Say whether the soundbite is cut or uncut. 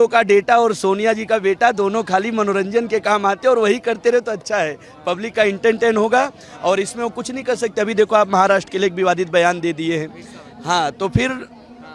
uncut